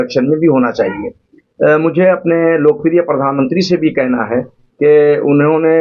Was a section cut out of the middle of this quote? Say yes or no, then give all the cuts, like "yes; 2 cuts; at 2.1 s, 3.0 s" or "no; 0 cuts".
no; 0 cuts